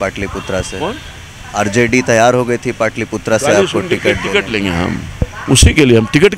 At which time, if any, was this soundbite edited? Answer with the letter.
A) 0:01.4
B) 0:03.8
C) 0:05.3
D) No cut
C